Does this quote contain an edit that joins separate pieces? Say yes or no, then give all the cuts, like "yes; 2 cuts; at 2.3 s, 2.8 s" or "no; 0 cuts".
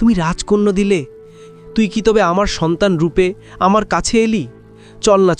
yes; 1 cut; at 1.4 s